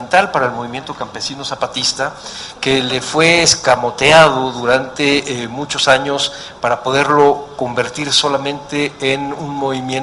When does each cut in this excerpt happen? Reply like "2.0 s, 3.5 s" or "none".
3.5 s